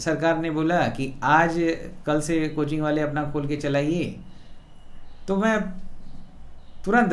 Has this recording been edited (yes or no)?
no